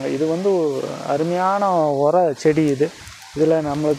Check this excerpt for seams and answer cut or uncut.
uncut